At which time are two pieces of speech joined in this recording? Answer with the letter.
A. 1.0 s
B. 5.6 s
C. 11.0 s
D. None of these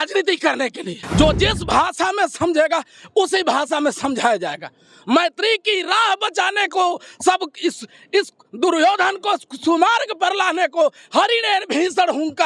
A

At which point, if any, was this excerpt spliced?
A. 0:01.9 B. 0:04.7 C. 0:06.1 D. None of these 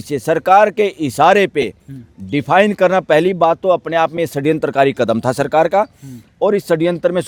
D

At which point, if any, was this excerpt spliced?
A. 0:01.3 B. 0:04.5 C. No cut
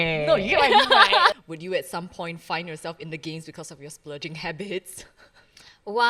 A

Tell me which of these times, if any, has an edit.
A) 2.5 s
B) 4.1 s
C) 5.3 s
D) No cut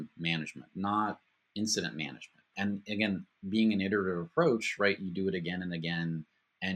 A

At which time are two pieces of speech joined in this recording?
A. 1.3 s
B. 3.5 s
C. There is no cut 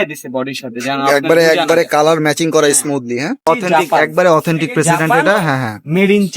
B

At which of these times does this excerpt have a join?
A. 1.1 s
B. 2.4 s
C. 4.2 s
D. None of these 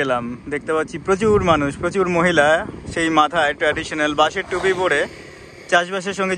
D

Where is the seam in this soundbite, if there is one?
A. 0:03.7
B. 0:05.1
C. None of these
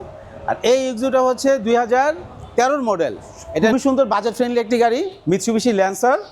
A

